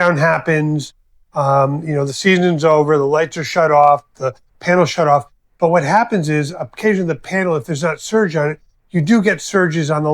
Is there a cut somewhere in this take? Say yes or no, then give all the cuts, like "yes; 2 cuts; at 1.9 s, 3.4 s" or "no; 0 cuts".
no; 0 cuts